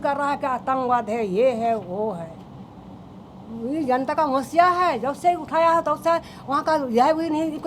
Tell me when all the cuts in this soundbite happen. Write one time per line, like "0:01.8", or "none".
none